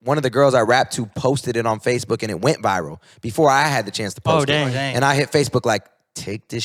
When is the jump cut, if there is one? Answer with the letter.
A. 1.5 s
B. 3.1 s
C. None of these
C